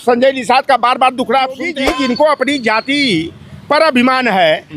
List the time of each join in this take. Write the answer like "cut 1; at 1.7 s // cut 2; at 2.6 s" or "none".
cut 1; at 1.7 s